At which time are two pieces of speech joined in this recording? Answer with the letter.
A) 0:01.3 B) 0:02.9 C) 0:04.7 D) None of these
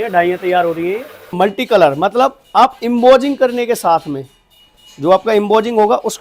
A